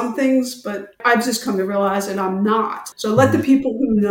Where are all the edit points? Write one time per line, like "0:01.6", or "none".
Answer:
0:00.9
0:02.9